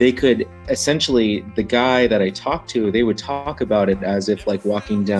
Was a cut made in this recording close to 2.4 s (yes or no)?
no